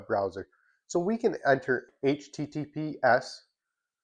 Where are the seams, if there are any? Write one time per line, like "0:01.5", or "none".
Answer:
0:01.8